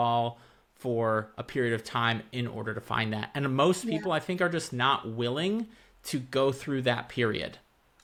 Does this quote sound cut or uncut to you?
uncut